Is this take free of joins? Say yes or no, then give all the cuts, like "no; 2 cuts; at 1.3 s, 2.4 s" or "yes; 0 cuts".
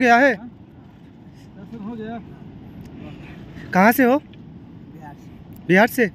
yes; 0 cuts